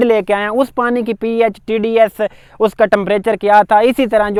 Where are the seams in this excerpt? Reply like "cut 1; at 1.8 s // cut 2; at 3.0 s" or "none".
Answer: none